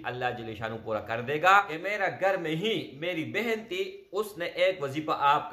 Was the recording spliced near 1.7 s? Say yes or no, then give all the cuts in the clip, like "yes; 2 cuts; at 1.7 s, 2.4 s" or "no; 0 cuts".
yes; 1 cut; at 1.7 s